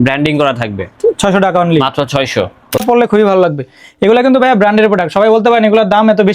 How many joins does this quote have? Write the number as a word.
one